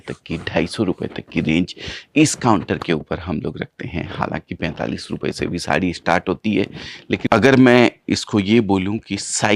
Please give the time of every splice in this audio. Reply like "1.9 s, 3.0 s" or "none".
7.3 s

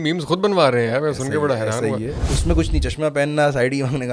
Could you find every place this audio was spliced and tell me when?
2.2 s

